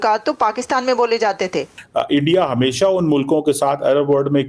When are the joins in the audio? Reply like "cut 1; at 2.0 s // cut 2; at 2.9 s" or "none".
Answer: cut 1; at 1.7 s